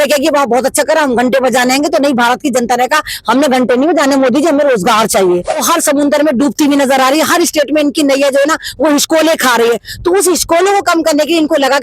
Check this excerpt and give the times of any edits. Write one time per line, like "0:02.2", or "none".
0:05.6